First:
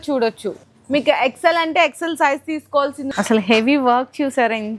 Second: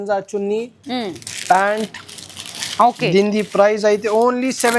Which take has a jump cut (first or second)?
first